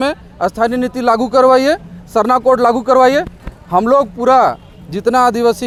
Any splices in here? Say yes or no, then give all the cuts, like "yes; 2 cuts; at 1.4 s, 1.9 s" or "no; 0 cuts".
no; 0 cuts